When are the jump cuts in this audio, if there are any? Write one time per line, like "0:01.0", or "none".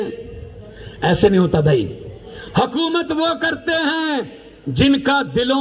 none